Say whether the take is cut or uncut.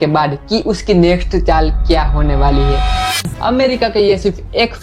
cut